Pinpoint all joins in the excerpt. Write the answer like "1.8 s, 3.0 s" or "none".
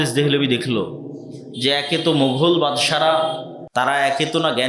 3.5 s